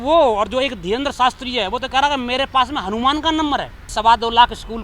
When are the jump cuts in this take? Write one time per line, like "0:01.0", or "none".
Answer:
0:03.9